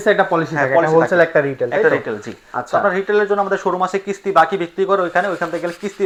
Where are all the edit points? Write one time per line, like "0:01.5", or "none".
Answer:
none

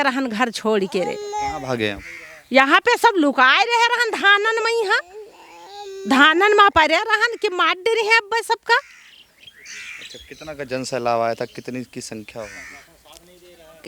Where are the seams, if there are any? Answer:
none

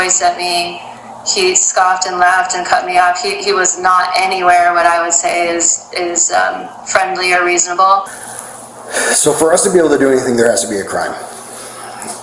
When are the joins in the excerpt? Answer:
0:08.1

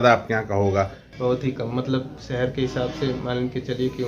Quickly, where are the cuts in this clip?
0:01.0

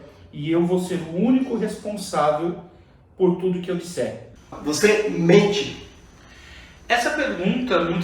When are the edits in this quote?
0:04.5

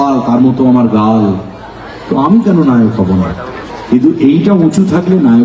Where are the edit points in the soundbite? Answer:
none

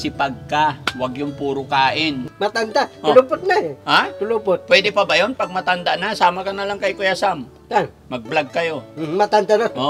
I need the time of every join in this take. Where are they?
0:02.3

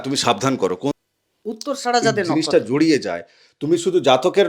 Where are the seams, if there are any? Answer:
0:01.0

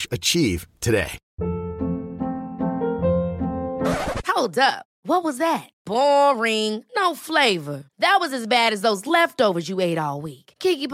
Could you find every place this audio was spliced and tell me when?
0:01.2

